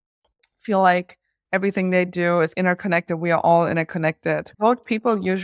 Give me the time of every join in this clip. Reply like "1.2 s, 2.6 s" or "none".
4.5 s

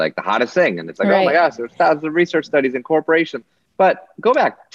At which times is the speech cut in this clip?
none

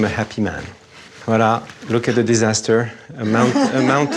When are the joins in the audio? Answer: 1.1 s

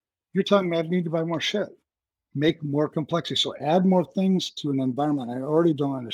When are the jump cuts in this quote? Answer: none

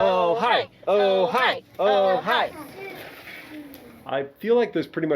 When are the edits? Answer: 2.6 s, 3.9 s

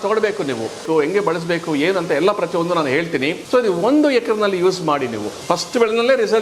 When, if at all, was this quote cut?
0.8 s, 3.4 s, 5.3 s

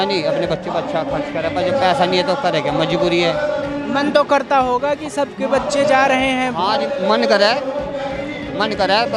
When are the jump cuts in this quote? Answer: none

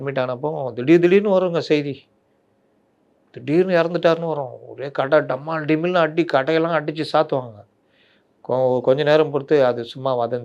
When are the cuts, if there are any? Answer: none

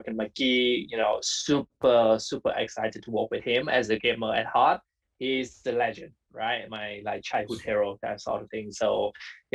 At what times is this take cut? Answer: none

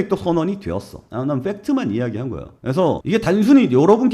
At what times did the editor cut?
none

